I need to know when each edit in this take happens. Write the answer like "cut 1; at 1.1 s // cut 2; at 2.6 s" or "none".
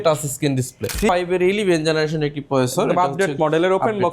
cut 1; at 1.1 s